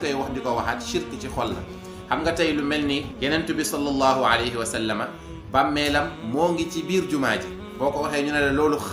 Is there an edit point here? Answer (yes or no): yes